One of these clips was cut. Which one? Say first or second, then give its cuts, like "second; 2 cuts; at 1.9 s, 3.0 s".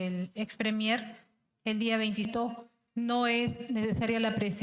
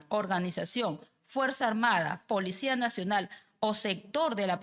first; 1 cut; at 2.3 s